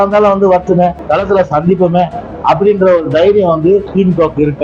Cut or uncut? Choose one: cut